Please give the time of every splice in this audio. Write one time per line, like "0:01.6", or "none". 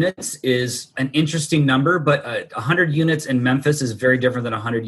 none